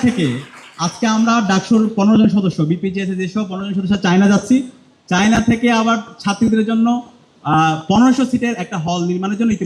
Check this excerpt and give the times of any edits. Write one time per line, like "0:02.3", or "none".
none